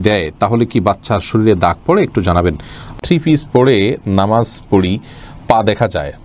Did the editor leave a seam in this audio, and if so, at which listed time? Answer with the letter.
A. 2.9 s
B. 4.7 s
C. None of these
A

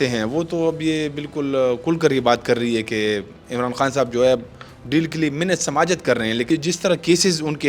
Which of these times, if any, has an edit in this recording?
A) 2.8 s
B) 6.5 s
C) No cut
B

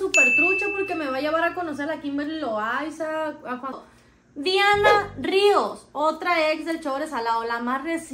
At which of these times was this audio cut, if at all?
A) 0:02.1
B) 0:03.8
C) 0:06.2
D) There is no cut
B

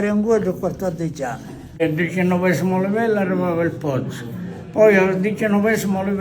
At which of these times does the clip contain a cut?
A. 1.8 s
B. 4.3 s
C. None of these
A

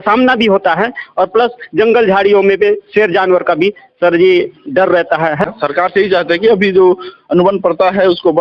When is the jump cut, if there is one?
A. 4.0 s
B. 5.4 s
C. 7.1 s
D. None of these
B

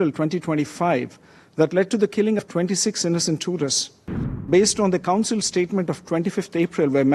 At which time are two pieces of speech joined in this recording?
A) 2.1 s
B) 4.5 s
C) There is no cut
B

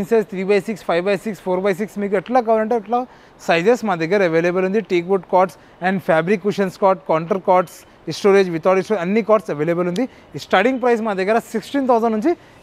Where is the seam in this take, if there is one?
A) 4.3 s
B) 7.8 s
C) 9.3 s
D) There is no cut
D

